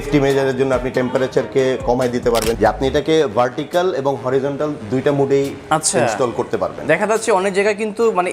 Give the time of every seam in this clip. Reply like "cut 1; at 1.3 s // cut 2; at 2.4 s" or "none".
cut 1; at 2.6 s